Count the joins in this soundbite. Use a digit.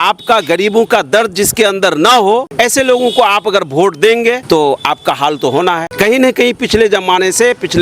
3